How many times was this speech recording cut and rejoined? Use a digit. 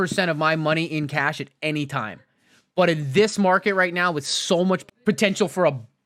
1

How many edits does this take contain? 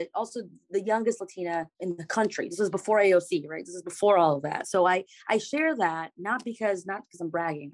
0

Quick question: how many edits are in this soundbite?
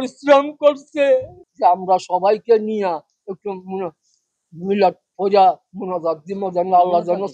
1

